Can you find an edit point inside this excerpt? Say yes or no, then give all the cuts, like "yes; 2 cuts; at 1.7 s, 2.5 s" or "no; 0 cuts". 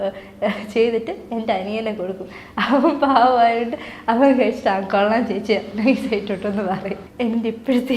yes; 1 cut; at 7.0 s